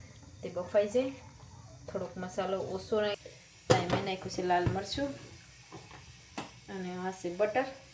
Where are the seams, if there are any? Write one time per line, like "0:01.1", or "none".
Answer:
0:03.2